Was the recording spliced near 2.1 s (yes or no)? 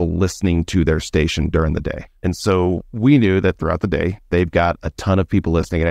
yes